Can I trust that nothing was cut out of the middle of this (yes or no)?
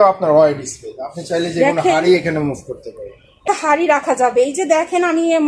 no